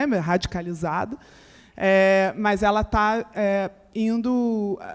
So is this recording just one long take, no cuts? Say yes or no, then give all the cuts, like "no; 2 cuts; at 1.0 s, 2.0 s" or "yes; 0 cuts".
yes; 0 cuts